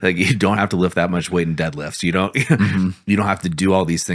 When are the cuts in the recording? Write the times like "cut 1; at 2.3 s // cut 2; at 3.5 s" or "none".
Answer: none